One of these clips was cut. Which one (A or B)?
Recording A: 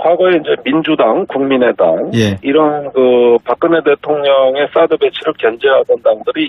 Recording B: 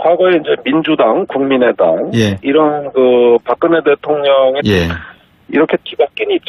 A